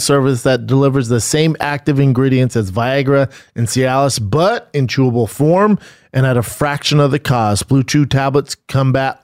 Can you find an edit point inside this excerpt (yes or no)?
no